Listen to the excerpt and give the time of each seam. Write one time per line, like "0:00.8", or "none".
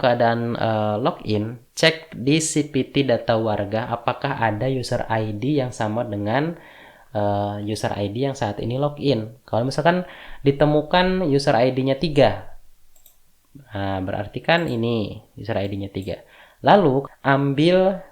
0:17.0